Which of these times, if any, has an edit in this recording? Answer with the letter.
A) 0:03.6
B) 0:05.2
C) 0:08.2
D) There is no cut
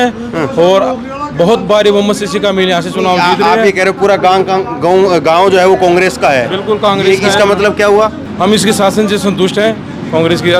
C